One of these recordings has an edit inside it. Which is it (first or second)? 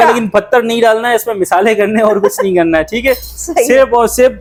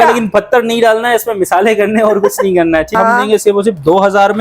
second